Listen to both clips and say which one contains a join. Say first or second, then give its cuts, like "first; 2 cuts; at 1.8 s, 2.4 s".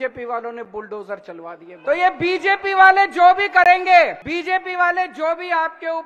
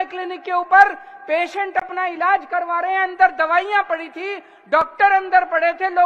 first; 2 cuts; at 1.7 s, 4.2 s